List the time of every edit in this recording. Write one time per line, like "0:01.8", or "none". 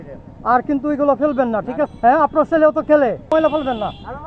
0:01.9
0:03.3